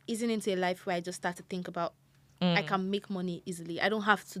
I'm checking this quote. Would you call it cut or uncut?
uncut